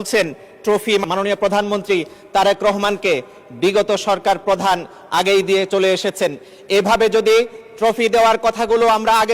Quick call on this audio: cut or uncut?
cut